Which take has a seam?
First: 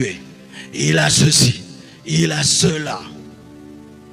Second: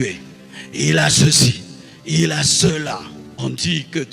second; 1 cut; at 3.2 s

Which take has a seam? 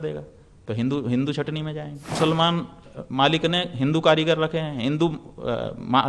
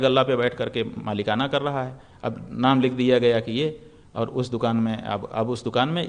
first; 1 cut; at 2.2 s

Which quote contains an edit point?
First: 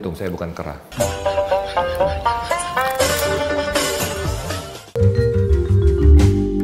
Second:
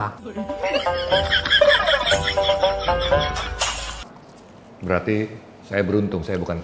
first; 1 cut; at 4.8 s

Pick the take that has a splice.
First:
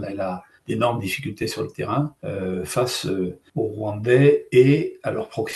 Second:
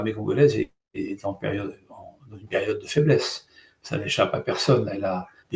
first; 2 cuts; at 2.2 s, 3.4 s

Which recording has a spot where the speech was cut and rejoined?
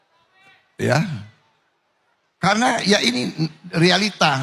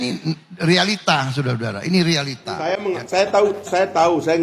second; 1 cut; at 2.7 s

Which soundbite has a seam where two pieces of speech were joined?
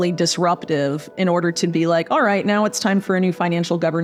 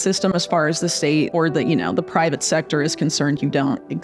second; 1 cut; at 1.3 s

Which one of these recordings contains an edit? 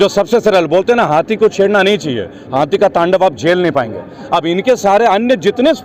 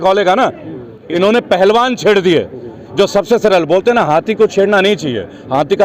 second; 1 cut; at 1.0 s

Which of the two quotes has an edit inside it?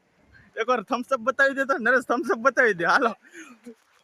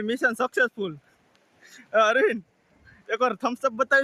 first; 1 cut; at 2.6 s

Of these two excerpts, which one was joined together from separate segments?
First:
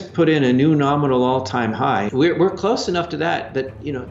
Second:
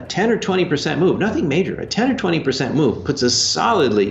first; 1 cut; at 2.1 s

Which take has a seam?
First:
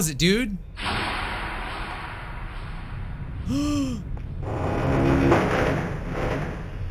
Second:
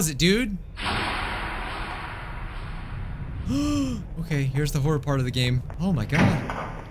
second; 2 cuts; at 4.1 s, 5.7 s

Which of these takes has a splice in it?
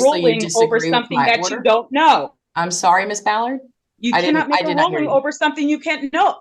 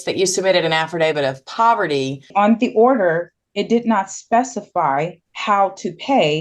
second; 2 cuts; at 2.3 s, 5.3 s

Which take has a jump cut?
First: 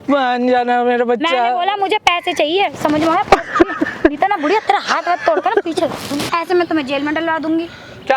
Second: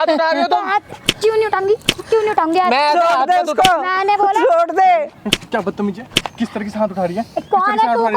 first; 1 cut; at 6.2 s

